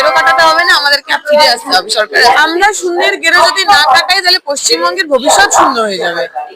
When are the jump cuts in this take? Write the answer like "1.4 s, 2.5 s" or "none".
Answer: 2.2 s